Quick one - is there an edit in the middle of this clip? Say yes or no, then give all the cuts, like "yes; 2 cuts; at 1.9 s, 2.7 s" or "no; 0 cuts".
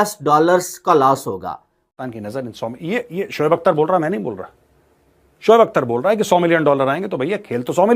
yes; 1 cut; at 1.9 s